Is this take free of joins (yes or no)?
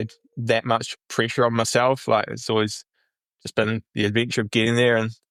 yes